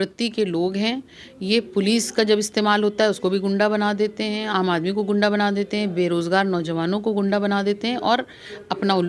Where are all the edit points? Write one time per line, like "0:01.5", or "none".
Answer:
none